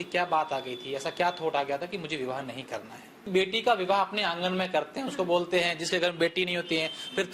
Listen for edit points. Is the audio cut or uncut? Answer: cut